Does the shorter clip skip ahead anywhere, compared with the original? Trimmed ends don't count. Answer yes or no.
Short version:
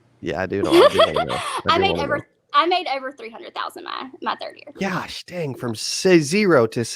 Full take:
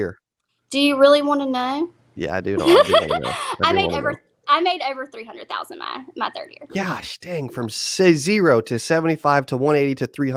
no